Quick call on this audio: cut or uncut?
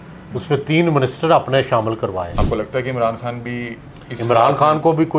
cut